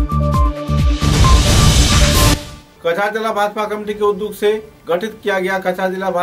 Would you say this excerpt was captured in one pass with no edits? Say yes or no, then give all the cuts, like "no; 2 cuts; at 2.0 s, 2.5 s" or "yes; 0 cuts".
yes; 0 cuts